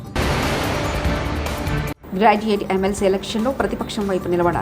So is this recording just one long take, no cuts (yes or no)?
no